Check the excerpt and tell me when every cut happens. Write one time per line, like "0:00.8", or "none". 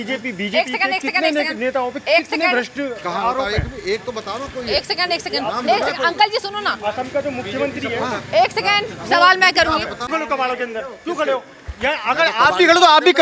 0:10.0